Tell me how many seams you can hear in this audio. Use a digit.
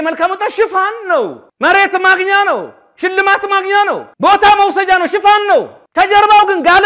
3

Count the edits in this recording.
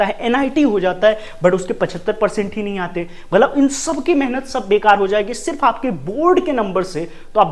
0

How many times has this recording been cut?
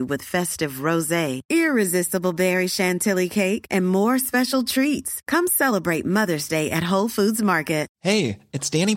1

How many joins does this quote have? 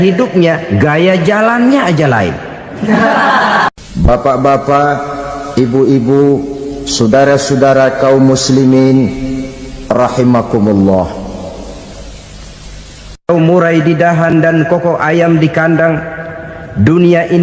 1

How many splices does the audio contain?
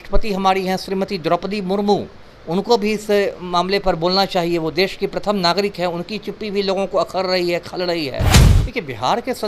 1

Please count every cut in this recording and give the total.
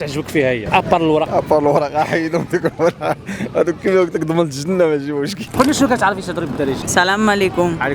3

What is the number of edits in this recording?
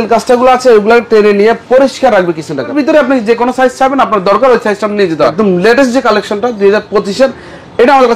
2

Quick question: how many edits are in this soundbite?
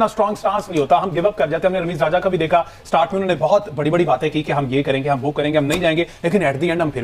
0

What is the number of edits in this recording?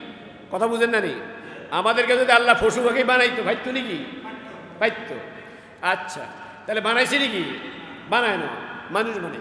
0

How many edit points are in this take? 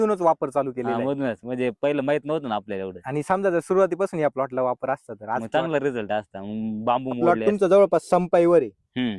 1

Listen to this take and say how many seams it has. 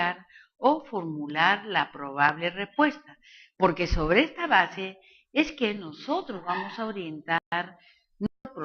1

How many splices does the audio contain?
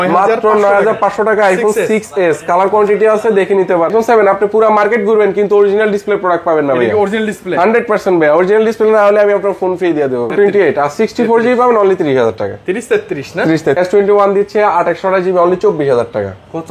3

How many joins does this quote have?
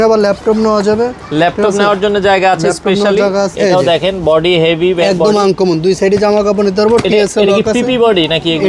1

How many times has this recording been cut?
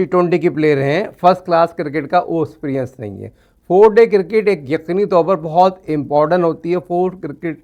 0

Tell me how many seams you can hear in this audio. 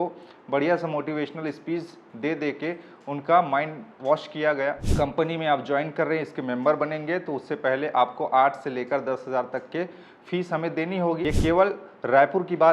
2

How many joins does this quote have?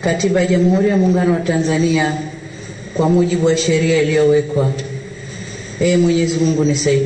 0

